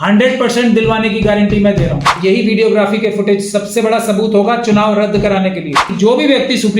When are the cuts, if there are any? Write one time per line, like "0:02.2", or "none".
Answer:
0:02.2
0:05.9

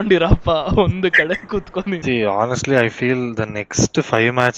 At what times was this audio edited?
0:02.0

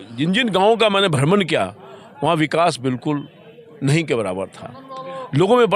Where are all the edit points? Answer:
none

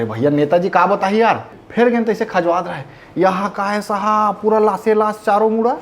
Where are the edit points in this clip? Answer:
0:01.5

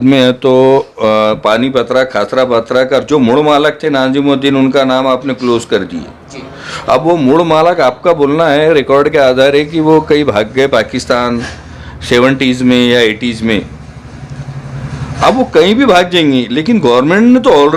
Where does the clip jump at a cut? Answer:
none

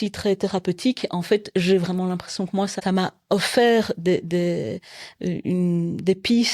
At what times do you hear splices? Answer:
0:02.8

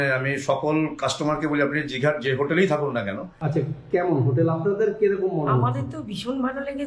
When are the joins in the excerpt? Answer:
0:03.3

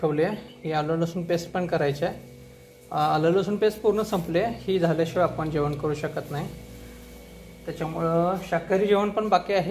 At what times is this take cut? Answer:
none

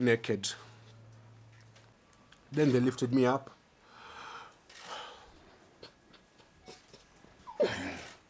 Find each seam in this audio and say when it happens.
0:01.9

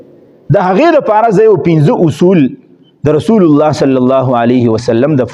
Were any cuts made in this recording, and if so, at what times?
none

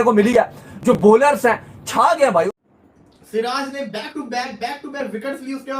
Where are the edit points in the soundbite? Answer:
0:02.5

